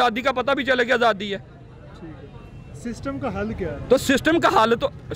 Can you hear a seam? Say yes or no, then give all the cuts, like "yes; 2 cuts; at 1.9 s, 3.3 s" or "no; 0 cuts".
no; 0 cuts